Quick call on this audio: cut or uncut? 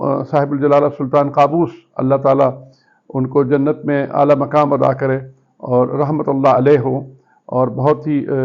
uncut